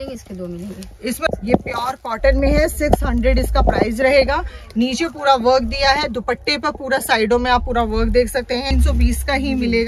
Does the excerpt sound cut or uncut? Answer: cut